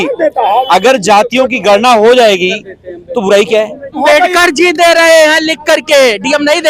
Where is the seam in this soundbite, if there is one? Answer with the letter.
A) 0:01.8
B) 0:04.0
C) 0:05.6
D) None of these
B